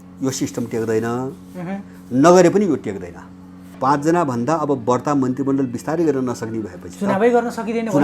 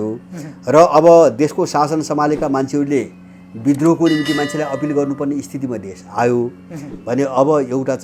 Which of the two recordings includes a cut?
first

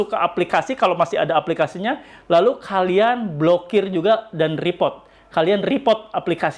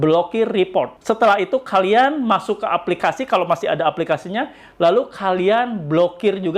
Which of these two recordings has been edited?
second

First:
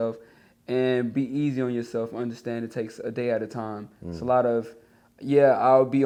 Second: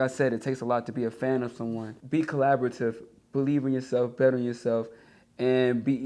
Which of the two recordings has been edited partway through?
second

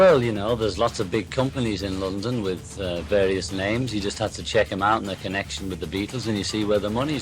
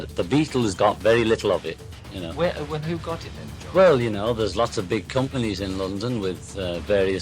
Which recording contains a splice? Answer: second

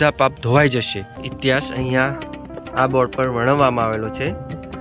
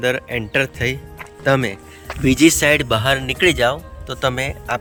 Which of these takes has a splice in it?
first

